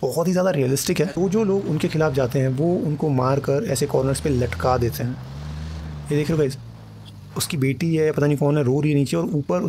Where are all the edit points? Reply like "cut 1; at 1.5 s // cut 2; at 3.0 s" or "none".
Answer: cut 1; at 1.1 s